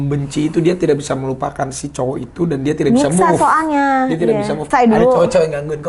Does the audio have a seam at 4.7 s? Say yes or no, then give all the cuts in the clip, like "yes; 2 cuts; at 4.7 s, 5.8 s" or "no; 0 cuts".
yes; 1 cut; at 4.7 s